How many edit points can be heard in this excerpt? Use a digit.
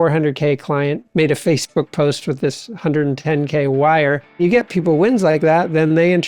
2